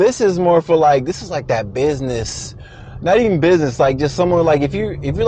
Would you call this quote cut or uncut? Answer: uncut